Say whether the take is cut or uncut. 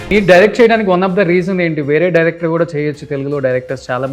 uncut